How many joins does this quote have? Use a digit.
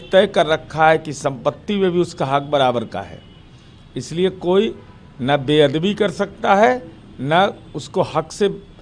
0